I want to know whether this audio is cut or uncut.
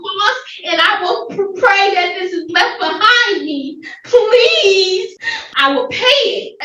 cut